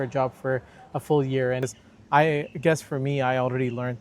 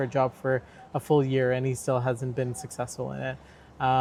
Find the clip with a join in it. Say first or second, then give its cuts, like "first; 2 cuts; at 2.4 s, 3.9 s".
first; 1 cut; at 1.6 s